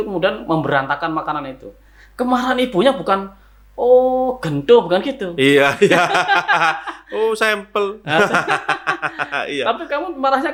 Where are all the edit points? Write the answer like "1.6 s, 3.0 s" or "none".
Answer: none